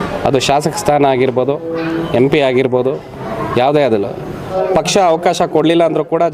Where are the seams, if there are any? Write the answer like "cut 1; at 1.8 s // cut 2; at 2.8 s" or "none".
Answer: cut 1; at 4.5 s